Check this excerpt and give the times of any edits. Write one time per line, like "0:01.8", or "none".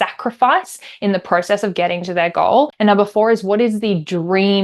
0:02.7